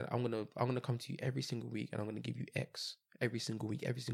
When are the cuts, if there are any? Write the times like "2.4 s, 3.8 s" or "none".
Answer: none